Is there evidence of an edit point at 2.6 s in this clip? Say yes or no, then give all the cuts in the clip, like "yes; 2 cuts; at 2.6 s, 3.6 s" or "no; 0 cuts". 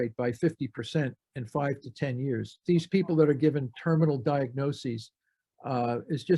yes; 1 cut; at 2.6 s